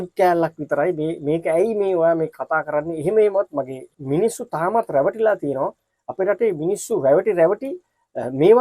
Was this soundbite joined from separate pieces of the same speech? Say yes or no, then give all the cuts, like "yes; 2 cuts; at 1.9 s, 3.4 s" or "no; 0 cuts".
yes; 1 cut; at 3.9 s